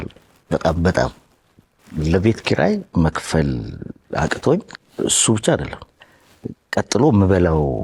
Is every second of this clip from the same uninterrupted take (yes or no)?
no